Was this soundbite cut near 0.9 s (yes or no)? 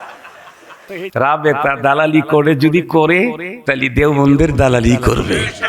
yes